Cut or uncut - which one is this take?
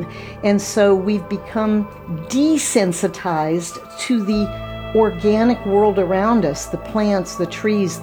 uncut